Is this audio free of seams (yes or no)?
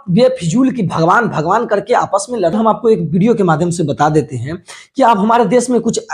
no